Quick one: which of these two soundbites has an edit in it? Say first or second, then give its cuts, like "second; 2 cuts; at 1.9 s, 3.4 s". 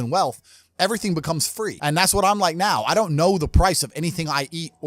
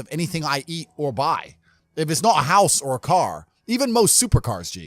first; 1 cut; at 1.8 s